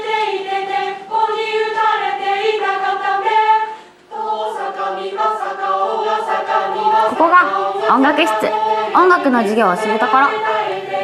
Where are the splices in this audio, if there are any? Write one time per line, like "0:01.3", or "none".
none